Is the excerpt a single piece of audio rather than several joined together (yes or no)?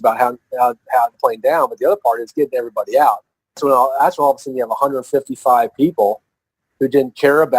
no